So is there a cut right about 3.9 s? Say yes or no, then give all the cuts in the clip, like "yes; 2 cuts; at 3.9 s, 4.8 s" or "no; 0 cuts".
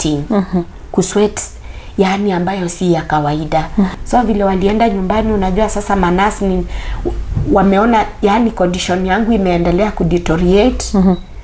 yes; 1 cut; at 3.9 s